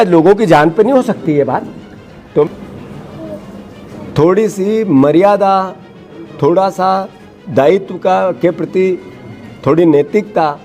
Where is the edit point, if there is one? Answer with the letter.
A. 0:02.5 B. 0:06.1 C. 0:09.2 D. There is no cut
A